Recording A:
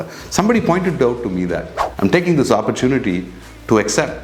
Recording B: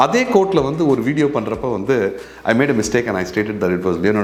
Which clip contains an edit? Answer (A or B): A